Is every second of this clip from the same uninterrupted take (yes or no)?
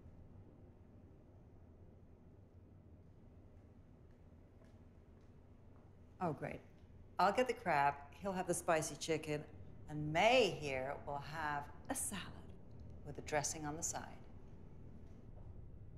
yes